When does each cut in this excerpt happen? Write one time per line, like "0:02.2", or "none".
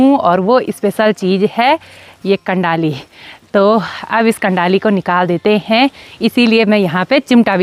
none